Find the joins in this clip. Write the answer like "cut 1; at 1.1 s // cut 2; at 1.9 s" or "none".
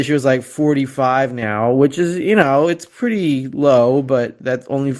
none